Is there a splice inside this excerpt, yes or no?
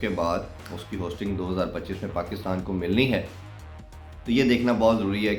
no